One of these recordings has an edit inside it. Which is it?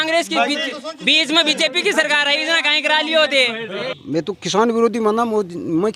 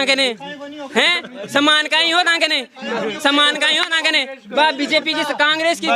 first; 1 cut; at 3.7 s

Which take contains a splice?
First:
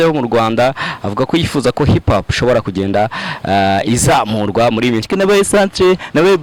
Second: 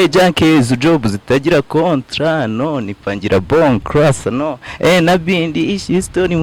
first; 1 cut; at 5.1 s

